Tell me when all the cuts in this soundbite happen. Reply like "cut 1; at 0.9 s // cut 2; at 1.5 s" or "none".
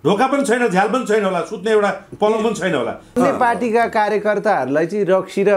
cut 1; at 3.1 s